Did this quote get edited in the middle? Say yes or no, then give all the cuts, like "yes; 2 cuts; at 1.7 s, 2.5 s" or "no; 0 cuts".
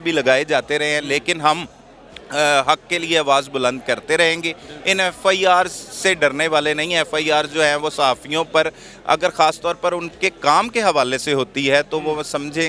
no; 0 cuts